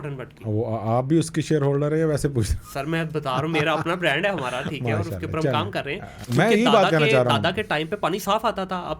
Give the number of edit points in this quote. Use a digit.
1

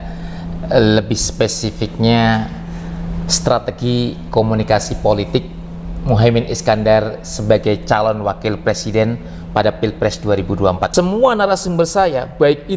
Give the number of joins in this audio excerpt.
1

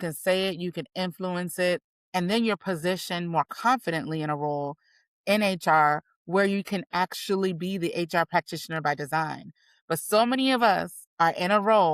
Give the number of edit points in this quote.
3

